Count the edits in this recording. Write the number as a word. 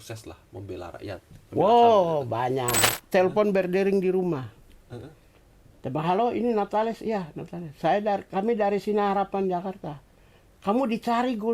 one